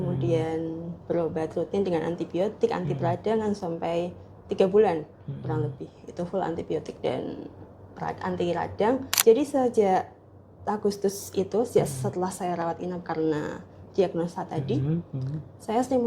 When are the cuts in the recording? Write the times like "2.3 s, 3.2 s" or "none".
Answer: 9.1 s